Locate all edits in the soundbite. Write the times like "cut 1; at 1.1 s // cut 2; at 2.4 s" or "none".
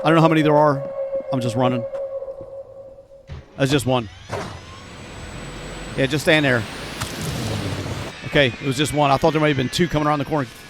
cut 1; at 8.1 s